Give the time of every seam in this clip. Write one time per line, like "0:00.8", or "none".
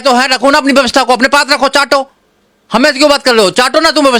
none